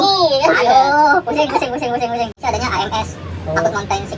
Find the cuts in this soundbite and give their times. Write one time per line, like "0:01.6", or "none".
0:02.4